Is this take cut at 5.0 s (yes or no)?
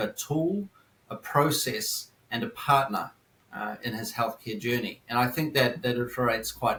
no